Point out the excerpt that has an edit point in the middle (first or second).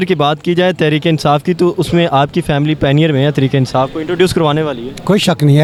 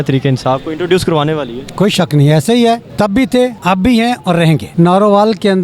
second